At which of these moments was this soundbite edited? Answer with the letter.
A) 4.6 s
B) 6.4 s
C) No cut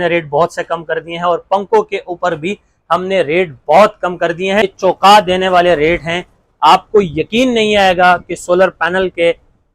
A